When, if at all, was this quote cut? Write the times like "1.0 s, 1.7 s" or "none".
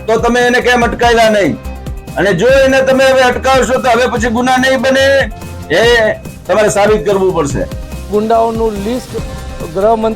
8.1 s